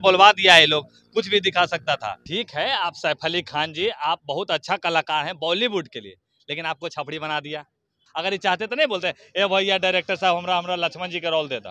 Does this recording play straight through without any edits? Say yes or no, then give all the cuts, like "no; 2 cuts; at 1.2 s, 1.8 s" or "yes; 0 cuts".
no; 2 cuts; at 2.2 s, 8.0 s